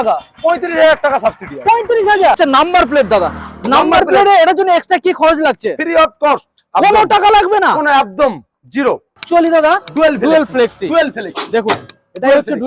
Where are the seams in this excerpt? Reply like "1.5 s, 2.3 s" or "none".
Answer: 2.4 s, 9.2 s